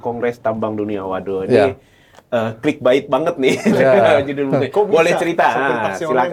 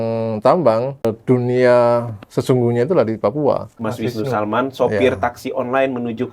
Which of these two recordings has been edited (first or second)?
second